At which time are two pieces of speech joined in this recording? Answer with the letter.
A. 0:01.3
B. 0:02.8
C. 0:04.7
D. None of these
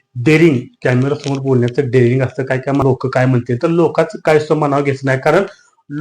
B